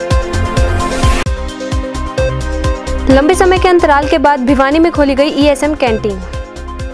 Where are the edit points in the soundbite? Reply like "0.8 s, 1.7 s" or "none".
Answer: none